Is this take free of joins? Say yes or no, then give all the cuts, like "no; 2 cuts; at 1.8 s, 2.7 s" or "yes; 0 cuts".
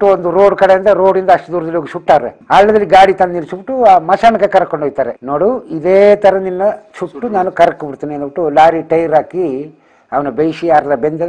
no; 1 cut; at 2.3 s